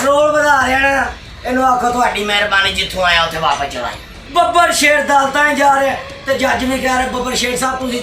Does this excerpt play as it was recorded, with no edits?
no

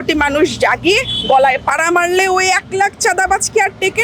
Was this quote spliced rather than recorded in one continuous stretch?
no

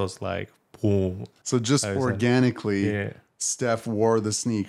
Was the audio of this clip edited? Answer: yes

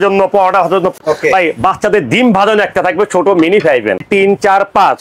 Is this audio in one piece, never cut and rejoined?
no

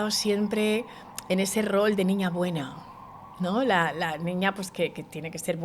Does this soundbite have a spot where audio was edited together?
no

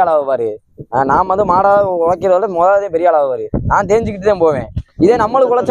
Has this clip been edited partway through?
no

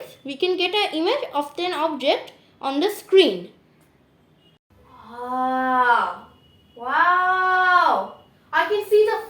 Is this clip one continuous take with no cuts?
no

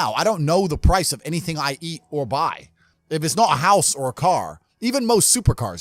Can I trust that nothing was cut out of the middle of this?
yes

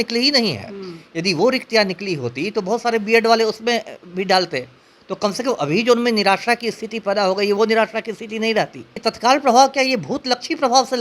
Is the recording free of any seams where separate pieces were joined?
no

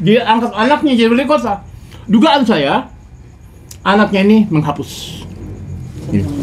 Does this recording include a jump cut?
no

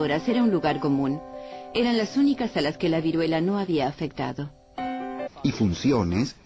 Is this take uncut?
yes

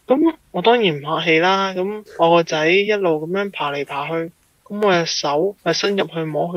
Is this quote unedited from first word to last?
no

